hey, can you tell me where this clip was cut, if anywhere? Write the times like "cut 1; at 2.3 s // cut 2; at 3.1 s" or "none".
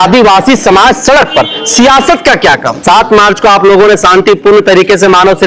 cut 1; at 2.8 s